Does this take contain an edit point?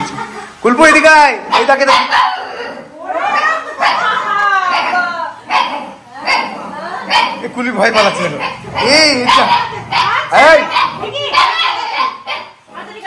no; 0 cuts

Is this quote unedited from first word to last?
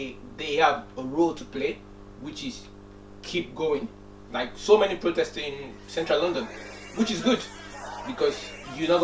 yes; 0 cuts

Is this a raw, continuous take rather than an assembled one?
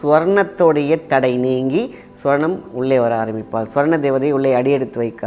yes; 0 cuts

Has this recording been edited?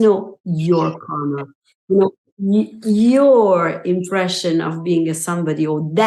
no; 0 cuts

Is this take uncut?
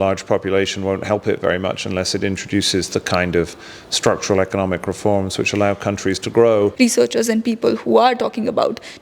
no; 1 cut; at 6.7 s

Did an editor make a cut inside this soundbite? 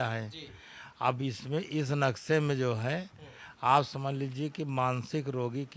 no; 0 cuts

